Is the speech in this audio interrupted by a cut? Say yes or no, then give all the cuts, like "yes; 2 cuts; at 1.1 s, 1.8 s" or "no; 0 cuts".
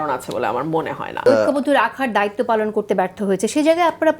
yes; 1 cut; at 1.2 s